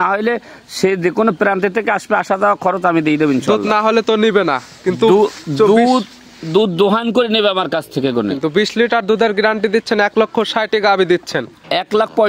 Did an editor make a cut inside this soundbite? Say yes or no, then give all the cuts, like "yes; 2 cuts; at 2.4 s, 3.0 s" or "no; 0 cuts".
no; 0 cuts